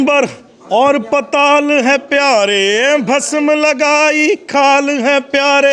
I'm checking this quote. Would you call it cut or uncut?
uncut